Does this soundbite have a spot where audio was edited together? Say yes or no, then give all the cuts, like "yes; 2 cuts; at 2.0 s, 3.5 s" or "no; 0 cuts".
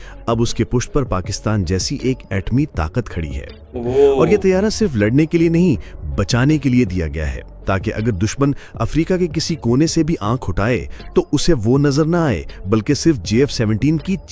no; 0 cuts